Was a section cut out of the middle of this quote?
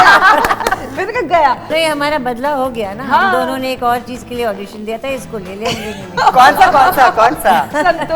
yes; 1 cut; at 1.7 s

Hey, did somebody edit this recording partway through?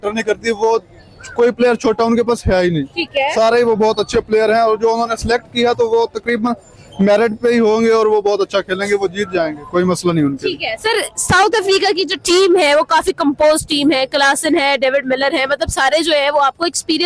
no; 0 cuts

